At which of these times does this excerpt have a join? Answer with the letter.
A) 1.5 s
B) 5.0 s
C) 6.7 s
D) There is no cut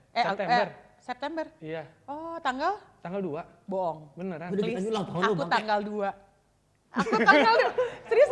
D